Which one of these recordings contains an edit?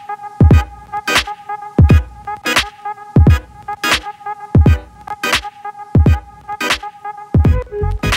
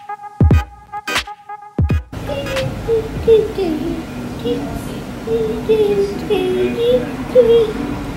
first; 1 cut; at 1.7 s

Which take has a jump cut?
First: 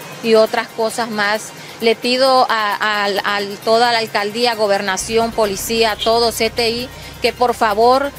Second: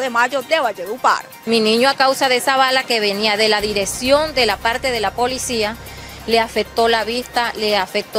second; 1 cut; at 1.3 s

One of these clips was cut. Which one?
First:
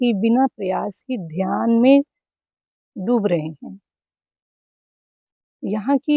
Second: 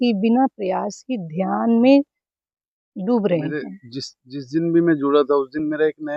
second; 1 cut; at 3.5 s

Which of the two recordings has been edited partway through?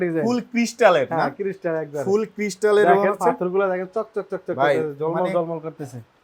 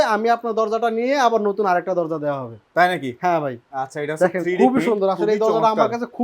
second; 1 cut; at 3.6 s

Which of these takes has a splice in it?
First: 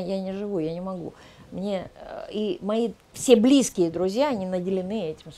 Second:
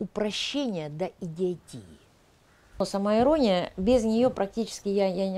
second; 1 cut; at 2.7 s

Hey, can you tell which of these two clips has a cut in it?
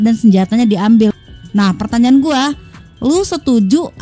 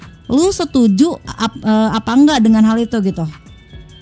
first; 1 cut; at 1.1 s

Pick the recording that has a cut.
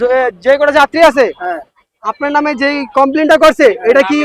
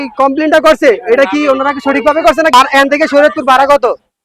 second; 1 cut; at 2.5 s

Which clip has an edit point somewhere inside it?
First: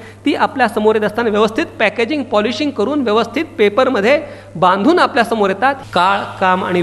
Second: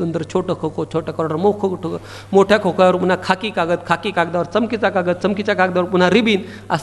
first; 1 cut; at 5.8 s

